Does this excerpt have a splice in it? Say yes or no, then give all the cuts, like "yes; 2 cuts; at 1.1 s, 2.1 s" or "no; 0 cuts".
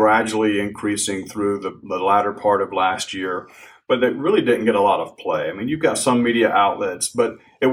no; 0 cuts